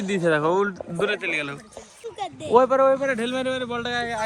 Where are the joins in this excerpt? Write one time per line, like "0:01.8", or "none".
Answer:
none

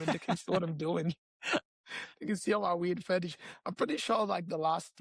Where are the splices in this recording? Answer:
none

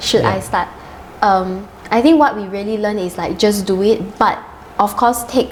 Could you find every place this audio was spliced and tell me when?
none

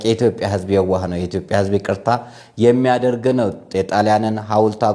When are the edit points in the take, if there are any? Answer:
none

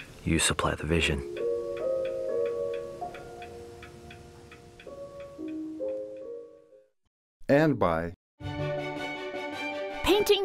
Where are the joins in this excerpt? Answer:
0:08.4

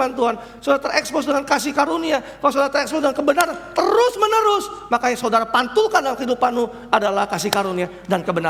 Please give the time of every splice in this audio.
none

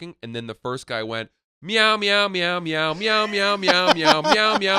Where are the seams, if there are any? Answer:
none

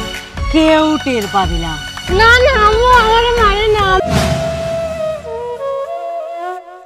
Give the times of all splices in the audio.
0:04.0

